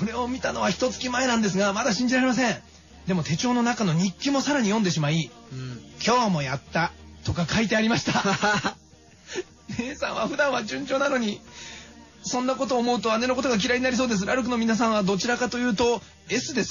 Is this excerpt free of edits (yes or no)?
yes